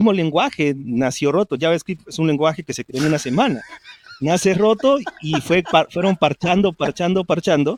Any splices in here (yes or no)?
no